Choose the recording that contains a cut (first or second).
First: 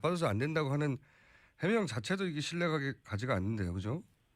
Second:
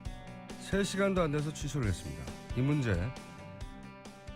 first